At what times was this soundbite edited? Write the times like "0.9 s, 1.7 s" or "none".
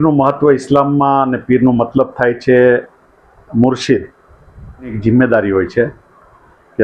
5.0 s

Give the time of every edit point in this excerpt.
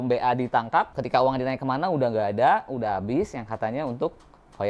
0.9 s

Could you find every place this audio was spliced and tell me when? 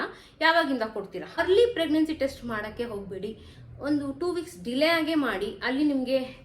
1.3 s

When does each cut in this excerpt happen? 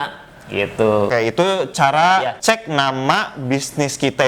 1.1 s, 2.4 s

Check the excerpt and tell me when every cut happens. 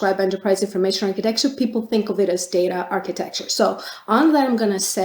none

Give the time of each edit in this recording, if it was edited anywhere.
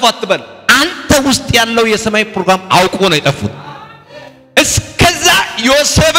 none

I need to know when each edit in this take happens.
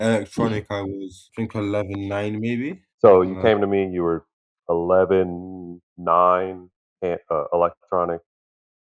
1.2 s

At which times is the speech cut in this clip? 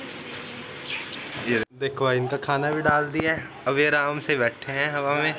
1.6 s

